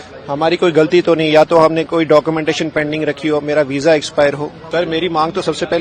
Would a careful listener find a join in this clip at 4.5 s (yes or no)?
yes